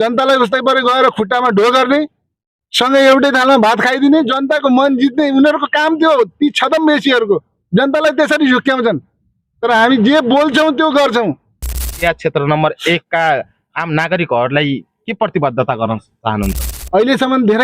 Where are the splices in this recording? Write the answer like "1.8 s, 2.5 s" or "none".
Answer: 12.0 s, 16.6 s